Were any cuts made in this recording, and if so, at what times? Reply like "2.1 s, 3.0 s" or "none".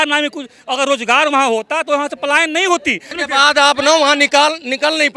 3.2 s